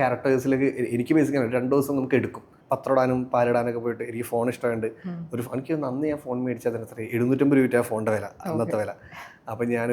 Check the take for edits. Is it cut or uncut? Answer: cut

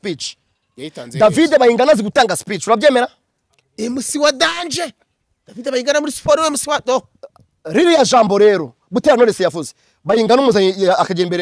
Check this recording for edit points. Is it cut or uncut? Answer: uncut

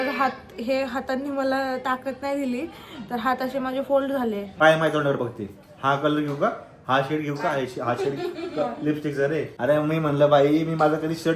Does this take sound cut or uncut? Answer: cut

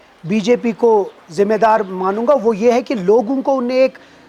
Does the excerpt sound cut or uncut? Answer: uncut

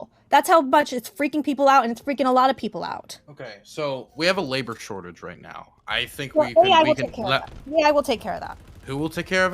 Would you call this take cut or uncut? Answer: uncut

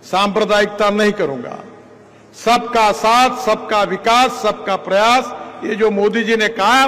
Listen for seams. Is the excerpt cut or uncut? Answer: uncut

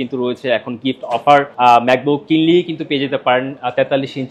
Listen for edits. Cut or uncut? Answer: cut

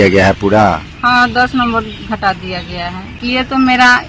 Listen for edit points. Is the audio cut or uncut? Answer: cut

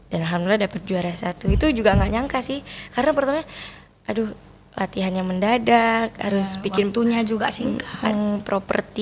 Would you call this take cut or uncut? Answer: uncut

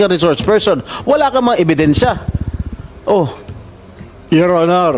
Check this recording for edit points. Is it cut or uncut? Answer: uncut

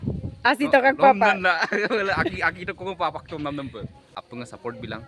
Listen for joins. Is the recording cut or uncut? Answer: cut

